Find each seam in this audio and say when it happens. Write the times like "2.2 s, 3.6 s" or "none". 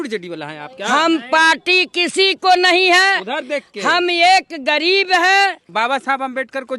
5.7 s